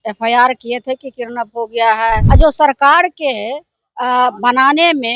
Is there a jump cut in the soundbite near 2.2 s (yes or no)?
yes